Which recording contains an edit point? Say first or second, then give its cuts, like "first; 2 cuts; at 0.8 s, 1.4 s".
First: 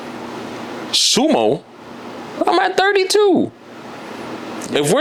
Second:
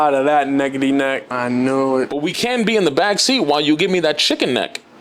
second; 1 cut; at 1.3 s